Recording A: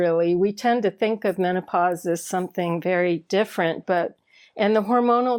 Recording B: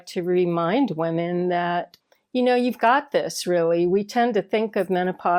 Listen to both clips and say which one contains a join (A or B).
B